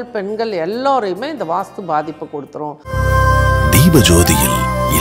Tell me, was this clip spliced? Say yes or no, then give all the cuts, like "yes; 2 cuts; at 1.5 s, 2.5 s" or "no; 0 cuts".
yes; 1 cut; at 2.8 s